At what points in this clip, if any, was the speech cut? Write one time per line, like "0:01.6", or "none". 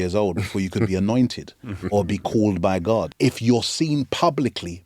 0:03.1